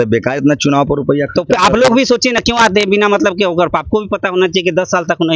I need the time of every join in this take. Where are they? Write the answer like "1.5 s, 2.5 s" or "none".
none

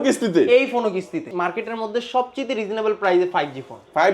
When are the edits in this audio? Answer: 1.3 s

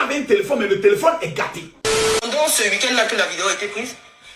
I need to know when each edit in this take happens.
2.2 s

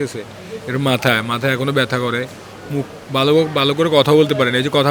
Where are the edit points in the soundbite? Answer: none

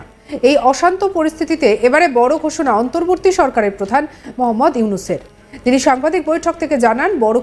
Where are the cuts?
none

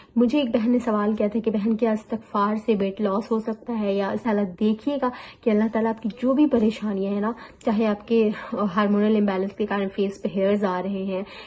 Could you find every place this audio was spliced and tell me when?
4.2 s

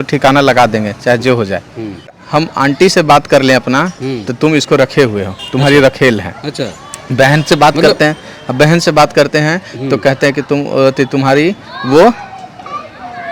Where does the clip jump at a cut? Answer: 2.2 s

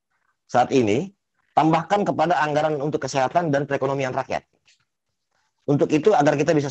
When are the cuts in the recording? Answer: none

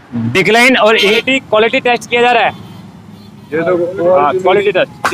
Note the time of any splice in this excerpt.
1.2 s

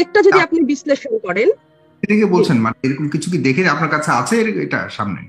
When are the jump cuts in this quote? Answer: none

